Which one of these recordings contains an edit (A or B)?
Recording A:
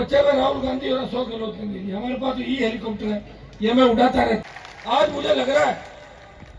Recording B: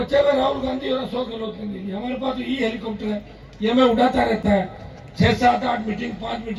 A